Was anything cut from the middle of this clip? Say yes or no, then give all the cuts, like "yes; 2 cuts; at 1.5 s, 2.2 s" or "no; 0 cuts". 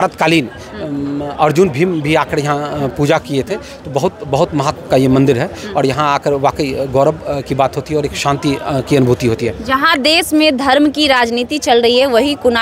no; 0 cuts